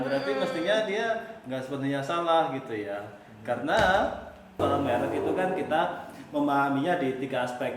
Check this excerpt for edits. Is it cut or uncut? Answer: cut